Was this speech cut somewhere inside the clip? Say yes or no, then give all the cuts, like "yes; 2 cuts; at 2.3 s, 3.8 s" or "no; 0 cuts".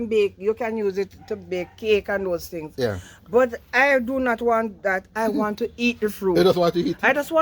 no; 0 cuts